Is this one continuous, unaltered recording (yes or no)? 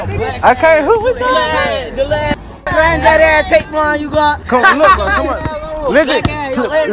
no